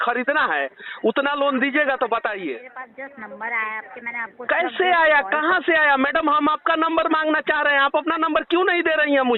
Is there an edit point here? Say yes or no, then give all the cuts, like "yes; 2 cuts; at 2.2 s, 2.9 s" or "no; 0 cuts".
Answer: yes; 1 cut; at 2.8 s